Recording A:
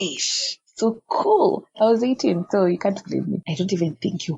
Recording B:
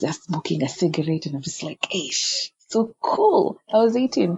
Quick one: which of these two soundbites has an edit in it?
A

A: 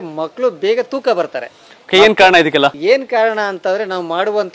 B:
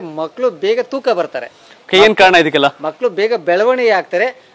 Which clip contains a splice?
A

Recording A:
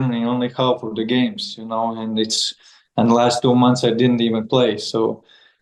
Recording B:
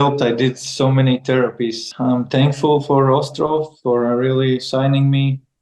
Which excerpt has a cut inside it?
B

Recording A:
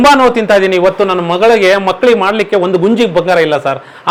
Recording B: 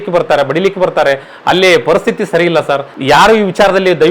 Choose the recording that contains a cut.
B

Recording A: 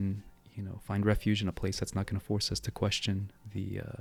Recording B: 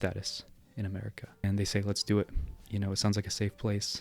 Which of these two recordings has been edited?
B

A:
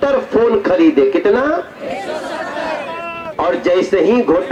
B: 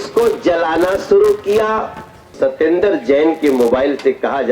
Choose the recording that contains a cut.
B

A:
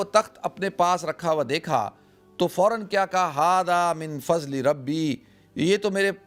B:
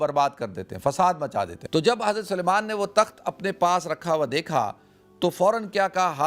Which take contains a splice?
B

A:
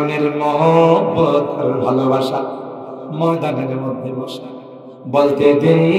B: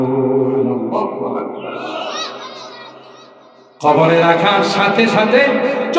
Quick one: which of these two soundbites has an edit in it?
B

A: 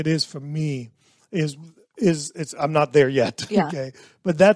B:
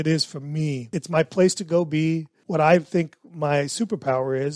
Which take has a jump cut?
B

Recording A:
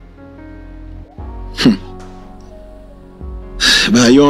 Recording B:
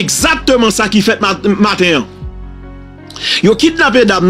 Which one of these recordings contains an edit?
A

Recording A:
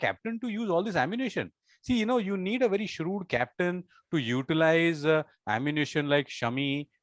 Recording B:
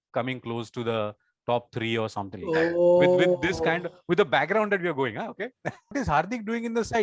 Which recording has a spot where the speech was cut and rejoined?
B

